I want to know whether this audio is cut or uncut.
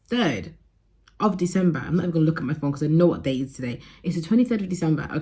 uncut